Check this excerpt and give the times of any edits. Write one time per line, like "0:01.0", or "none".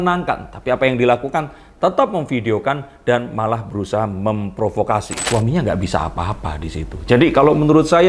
0:05.2